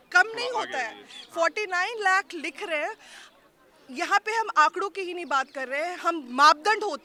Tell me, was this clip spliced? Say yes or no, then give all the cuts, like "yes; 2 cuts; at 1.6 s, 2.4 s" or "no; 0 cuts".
no; 0 cuts